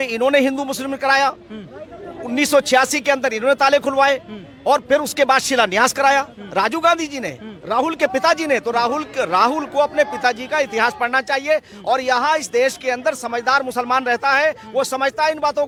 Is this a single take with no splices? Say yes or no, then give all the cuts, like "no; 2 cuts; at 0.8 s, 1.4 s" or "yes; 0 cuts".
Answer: yes; 0 cuts